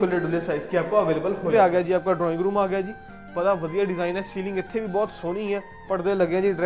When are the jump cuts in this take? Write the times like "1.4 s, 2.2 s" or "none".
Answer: 1.5 s